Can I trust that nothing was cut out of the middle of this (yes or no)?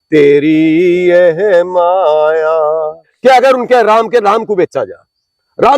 no